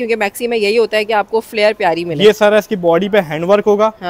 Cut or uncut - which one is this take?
uncut